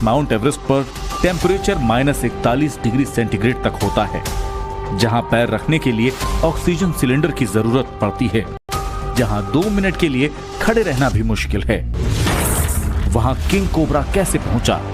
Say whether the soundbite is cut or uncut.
uncut